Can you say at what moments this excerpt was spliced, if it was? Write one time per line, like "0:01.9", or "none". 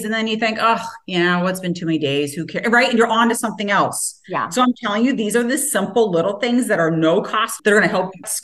0:07.5

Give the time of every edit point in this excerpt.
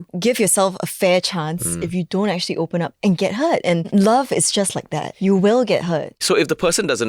0:03.9
0:05.1
0:06.2

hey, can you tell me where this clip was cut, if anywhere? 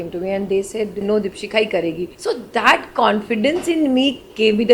0:01.0
0:02.1

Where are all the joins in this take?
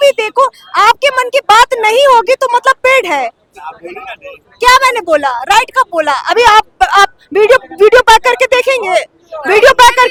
none

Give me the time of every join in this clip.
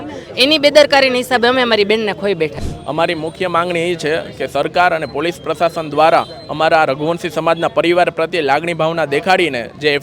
0:02.7

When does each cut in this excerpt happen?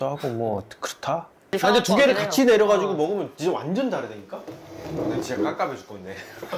0:01.5

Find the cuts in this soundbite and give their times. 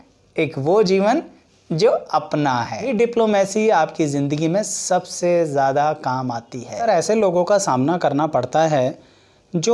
0:02.9
0:06.8

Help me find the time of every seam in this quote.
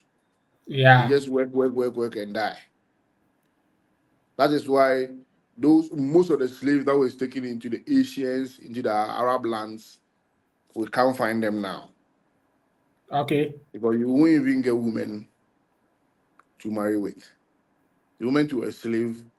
none

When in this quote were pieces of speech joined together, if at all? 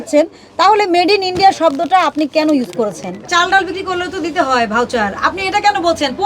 0:03.3

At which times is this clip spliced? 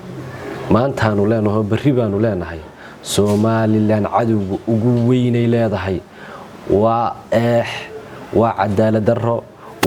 none

